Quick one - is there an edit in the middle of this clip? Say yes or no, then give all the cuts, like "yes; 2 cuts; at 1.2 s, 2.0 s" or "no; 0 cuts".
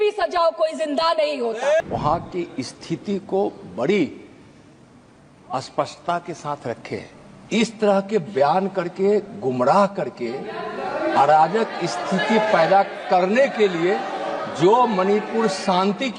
yes; 1 cut; at 1.9 s